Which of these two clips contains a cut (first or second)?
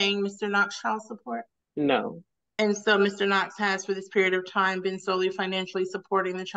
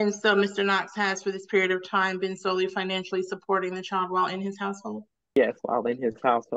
first